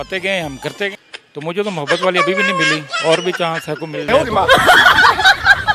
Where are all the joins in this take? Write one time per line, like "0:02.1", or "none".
0:01.0

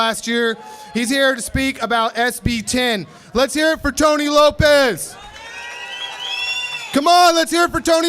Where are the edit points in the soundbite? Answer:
0:06.1

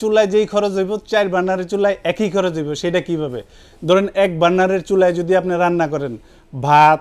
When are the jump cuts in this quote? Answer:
none

